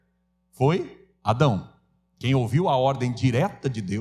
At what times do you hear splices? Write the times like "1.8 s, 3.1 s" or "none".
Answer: 1.0 s